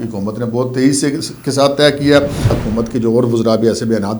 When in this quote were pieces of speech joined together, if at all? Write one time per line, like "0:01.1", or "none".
0:02.6

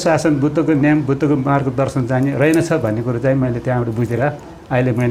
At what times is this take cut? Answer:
none

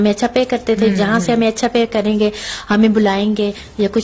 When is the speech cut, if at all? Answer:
none

